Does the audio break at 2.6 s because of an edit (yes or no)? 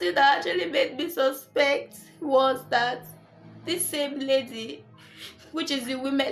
no